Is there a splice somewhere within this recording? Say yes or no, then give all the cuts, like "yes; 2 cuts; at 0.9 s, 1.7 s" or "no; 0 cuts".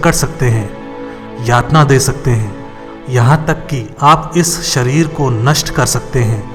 no; 0 cuts